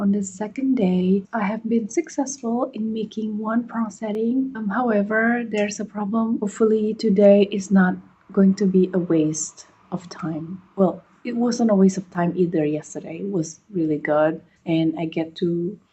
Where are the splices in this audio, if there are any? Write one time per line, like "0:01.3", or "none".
0:01.2
0:04.6
0:06.5

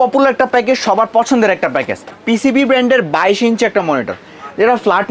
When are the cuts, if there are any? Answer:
0:02.2

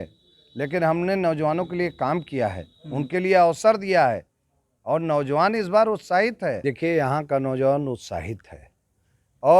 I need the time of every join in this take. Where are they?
0:06.6

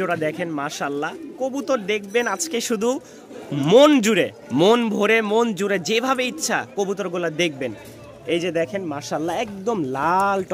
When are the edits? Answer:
none

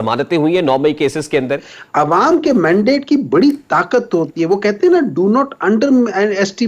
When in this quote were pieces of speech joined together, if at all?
0:01.8

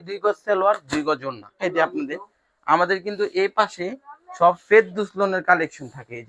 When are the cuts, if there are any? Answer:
0:01.6

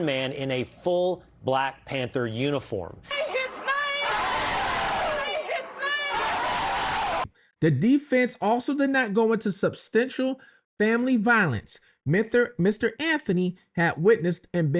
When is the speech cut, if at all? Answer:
0:03.1
0:07.4

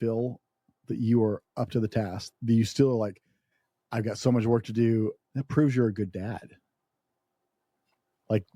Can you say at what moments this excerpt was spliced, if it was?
0:02.2
0:05.2

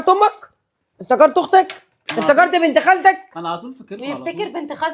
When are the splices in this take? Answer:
none

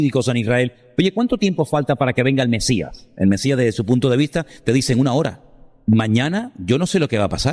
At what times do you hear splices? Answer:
0:05.7

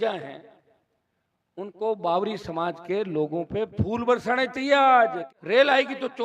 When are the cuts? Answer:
0:05.3

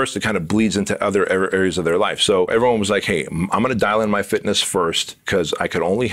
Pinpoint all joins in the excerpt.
0:02.5
0:05.1

